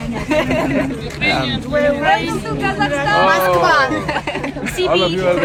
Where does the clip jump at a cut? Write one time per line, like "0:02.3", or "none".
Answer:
none